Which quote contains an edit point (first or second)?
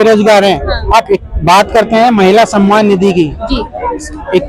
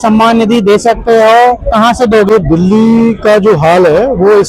second